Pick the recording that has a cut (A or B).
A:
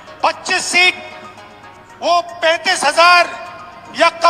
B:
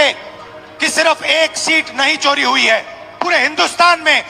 B